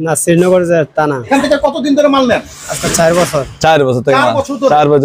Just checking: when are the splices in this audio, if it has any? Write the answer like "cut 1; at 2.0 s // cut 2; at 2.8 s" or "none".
cut 1; at 1.2 s